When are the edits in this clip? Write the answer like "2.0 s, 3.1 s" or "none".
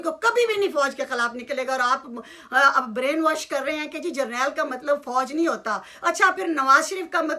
none